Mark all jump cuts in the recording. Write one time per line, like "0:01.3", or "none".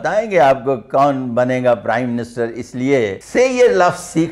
0:03.2